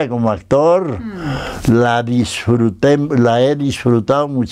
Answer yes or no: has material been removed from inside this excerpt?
no